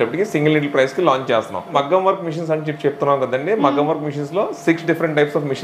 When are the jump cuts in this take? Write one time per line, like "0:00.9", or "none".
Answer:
0:01.7